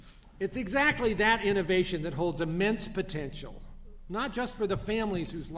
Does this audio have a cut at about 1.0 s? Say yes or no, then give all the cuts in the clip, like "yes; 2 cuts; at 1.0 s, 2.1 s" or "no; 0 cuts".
no; 1 cut; at 2.4 s